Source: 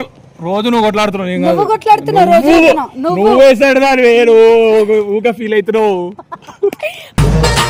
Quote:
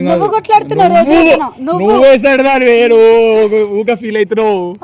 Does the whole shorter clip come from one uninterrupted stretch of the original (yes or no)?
yes